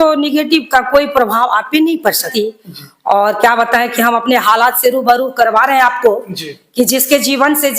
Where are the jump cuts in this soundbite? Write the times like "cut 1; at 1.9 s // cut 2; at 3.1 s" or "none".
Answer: cut 1; at 2.3 s